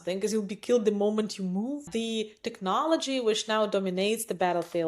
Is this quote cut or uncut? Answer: cut